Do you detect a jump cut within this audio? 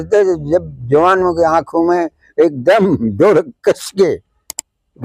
no; 0 cuts

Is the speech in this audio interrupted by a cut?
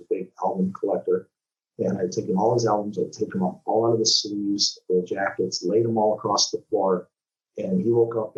no; 0 cuts

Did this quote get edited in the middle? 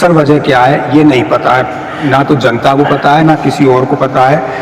no; 0 cuts

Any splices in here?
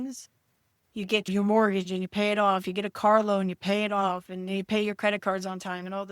no; 0 cuts

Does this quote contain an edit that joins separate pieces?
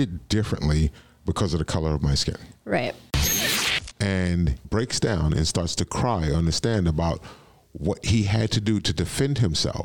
yes; 2 cuts; at 3.4 s, 4.6 s

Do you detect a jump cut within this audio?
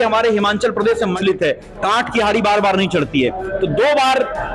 yes; 1 cut; at 1.2 s

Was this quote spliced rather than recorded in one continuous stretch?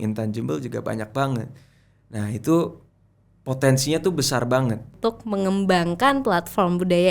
yes; 1 cut; at 4.9 s

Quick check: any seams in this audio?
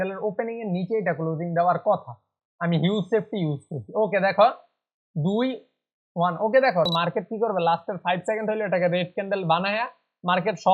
yes; 1 cut; at 6.9 s

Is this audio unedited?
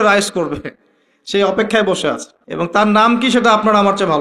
no; 1 cut; at 2.8 s

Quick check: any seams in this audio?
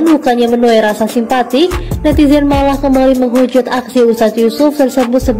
no; 0 cuts

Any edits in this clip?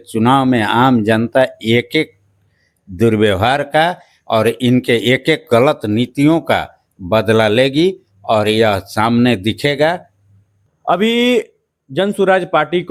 no; 0 cuts

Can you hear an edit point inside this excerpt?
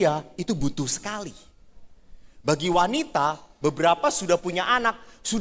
no; 0 cuts

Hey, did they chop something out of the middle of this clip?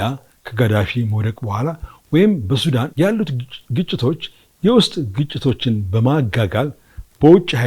yes; 1 cut; at 2.9 s

